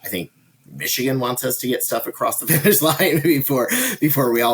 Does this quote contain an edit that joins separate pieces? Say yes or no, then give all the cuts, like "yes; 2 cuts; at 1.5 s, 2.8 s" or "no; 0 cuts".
no; 0 cuts